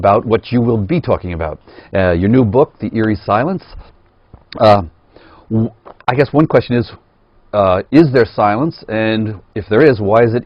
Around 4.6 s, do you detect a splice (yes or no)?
no